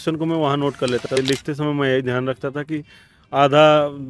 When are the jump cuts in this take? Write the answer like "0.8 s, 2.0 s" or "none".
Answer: 1.2 s